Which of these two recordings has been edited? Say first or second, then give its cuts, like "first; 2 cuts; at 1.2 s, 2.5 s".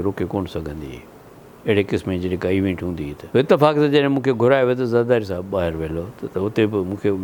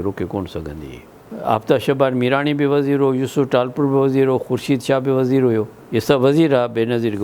second; 1 cut; at 1.3 s